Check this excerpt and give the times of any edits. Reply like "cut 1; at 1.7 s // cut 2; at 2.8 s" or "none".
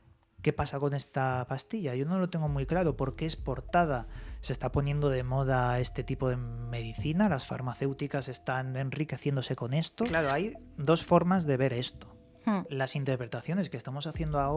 cut 1; at 10.1 s